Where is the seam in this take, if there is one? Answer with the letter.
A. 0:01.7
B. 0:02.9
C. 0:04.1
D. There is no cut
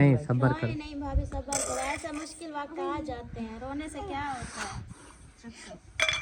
D